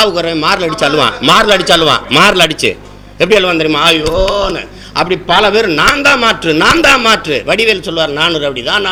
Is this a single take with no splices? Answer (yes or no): yes